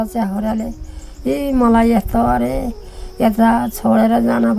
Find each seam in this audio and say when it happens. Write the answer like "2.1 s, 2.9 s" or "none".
none